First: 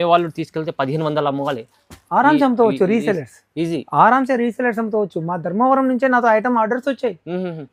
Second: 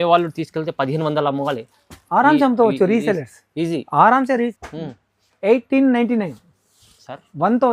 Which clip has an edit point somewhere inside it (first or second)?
second